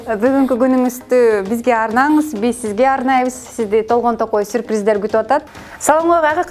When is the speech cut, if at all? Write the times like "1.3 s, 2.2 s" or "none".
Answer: 5.5 s